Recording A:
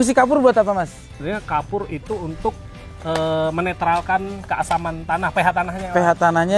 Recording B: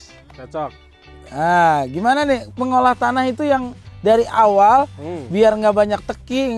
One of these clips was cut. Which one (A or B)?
A